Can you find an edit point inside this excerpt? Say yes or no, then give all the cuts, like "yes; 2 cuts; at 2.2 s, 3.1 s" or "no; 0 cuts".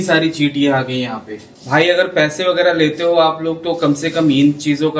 no; 0 cuts